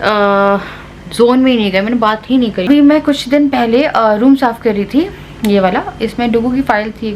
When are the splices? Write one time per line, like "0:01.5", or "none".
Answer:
0:02.6